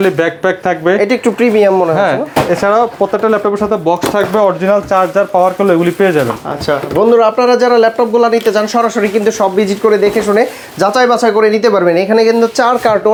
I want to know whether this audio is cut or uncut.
uncut